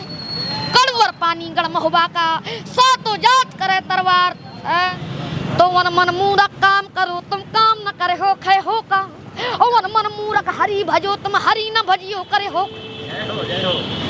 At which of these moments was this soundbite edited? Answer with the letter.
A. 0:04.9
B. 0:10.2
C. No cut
A